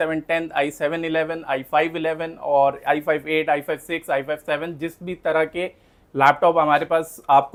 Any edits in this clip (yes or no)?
no